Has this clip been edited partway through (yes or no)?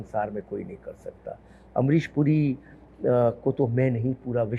no